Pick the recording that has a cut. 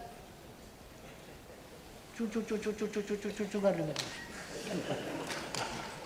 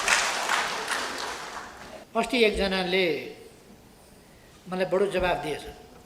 second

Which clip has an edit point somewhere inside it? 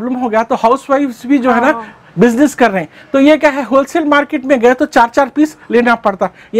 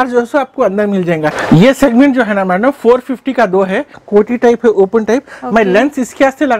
second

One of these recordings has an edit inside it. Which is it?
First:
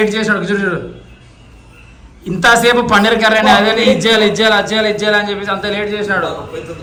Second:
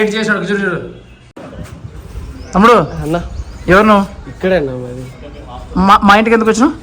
second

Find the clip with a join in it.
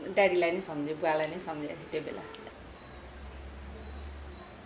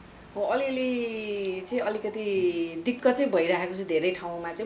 first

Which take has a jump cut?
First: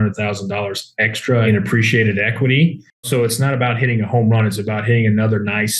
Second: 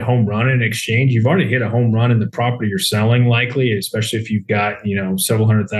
first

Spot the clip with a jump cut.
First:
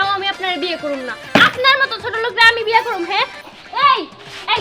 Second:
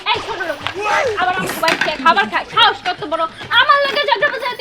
first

